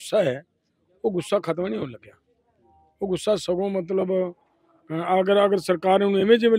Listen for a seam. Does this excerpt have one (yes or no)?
no